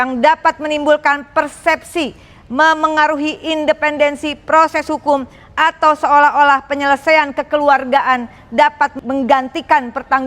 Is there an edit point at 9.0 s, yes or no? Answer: yes